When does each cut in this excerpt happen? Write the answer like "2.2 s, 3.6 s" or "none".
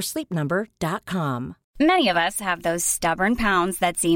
1.6 s